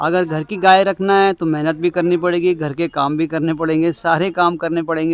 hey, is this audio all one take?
yes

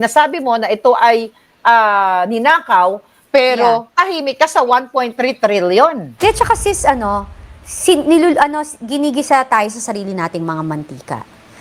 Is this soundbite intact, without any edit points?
no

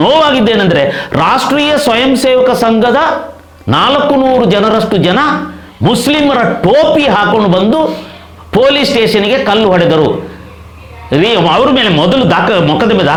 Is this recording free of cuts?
yes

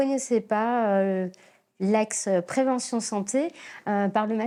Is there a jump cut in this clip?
no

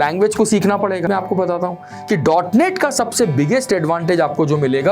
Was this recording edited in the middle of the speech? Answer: yes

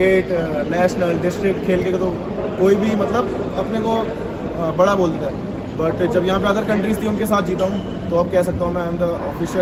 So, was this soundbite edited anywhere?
no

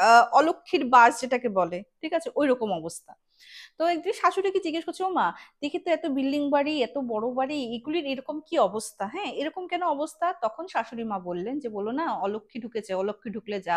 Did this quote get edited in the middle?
no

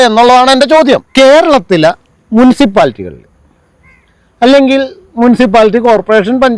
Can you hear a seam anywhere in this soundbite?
yes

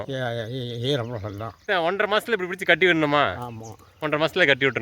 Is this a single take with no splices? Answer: no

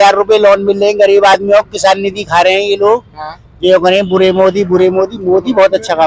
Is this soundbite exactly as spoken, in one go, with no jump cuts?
yes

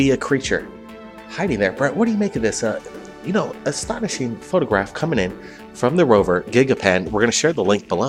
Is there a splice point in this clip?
no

